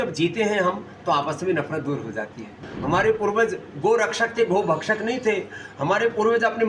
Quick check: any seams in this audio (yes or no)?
yes